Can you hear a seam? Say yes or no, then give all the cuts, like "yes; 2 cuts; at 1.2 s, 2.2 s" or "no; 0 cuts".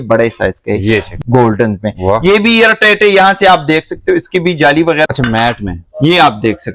yes; 2 cuts; at 1.1 s, 5.1 s